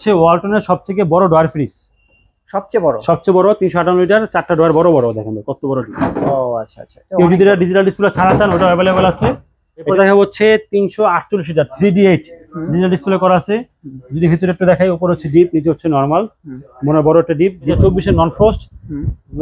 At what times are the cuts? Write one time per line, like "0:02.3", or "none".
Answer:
0:09.9
0:17.8